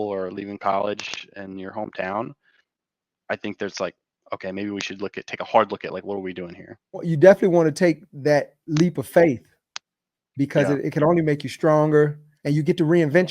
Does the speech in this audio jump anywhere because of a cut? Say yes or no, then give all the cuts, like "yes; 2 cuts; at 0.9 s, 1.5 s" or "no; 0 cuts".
yes; 2 cuts; at 7.0 s, 12.3 s